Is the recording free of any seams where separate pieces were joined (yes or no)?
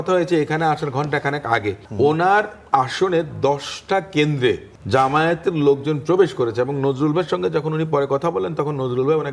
no